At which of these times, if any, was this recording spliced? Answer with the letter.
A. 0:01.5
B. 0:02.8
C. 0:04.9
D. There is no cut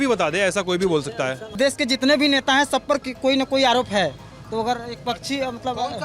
A